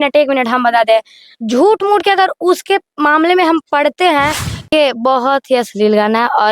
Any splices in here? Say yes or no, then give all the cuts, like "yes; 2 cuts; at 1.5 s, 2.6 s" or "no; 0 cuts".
yes; 1 cut; at 4.7 s